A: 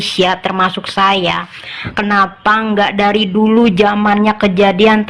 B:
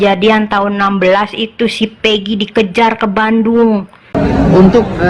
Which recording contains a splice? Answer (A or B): B